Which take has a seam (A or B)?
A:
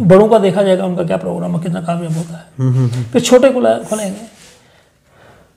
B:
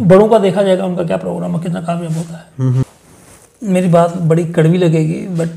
B